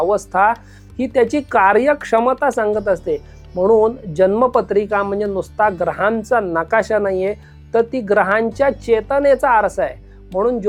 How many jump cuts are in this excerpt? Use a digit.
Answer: 0